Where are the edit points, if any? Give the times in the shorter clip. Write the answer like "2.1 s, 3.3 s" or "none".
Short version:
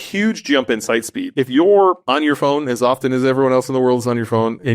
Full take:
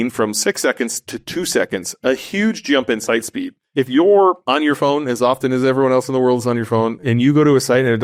1.2 s